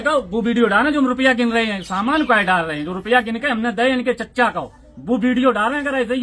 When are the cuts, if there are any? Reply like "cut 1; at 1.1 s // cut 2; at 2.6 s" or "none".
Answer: none

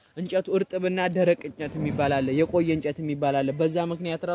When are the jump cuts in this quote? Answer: none

